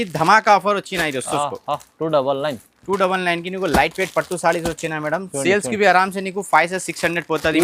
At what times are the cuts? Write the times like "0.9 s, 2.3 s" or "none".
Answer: none